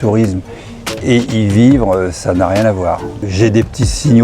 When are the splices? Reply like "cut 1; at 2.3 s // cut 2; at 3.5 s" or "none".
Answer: cut 1; at 3.2 s